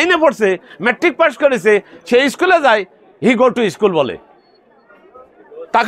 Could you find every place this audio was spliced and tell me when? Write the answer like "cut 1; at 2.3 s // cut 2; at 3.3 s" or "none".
none